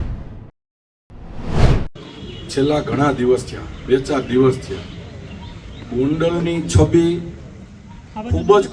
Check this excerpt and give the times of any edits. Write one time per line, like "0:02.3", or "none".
0:01.9